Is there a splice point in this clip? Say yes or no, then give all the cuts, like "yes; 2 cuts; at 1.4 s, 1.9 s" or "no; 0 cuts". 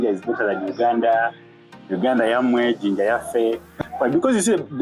yes; 1 cut; at 3.8 s